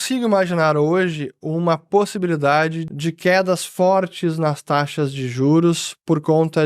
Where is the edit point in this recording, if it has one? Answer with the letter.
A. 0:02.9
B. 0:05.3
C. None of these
A